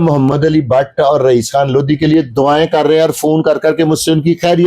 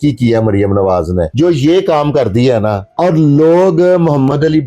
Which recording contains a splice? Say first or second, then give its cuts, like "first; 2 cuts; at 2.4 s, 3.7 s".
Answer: second; 2 cuts; at 1.3 s, 2.8 s